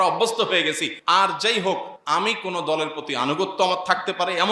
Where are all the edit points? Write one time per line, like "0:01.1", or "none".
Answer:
0:00.9
0:01.9